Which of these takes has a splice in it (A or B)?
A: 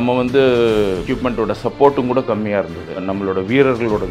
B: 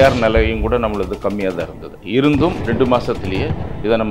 A